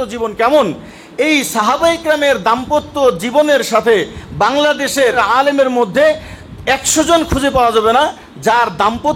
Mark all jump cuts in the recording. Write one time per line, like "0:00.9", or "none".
0:05.2